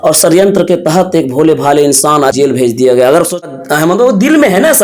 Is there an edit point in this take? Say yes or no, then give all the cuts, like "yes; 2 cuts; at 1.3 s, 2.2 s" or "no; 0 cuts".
yes; 2 cuts; at 2.3 s, 3.4 s